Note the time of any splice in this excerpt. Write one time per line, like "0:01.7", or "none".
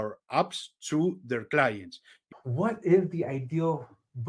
0:02.3